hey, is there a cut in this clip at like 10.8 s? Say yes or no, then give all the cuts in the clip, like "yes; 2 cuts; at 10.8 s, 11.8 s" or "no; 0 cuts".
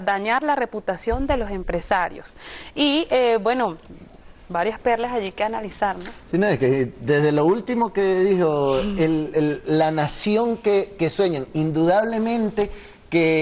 yes; 1 cut; at 10.8 s